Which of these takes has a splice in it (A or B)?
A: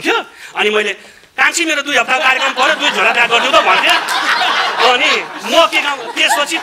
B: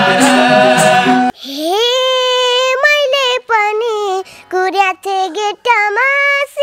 B